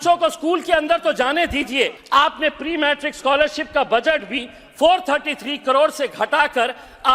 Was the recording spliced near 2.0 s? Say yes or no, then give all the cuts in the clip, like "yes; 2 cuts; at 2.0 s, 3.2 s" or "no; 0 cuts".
yes; 1 cut; at 2.0 s